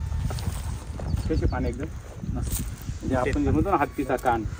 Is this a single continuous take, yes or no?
yes